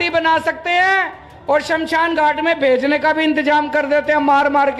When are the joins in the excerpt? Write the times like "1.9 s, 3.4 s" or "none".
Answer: none